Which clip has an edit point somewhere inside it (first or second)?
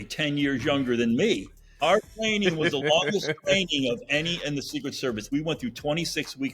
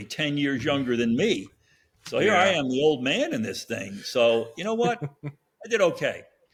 first